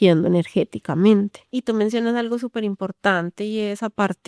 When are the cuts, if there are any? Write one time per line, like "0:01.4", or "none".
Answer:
0:01.5